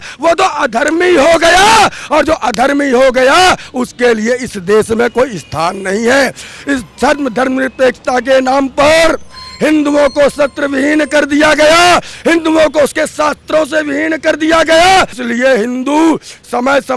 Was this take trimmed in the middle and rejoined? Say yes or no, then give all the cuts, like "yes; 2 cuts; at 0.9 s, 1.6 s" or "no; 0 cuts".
no; 0 cuts